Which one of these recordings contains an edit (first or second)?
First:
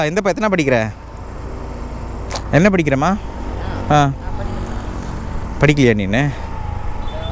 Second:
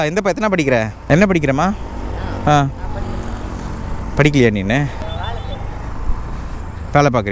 second